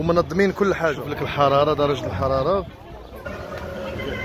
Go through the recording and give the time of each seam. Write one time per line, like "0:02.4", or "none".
0:01.0
0:03.2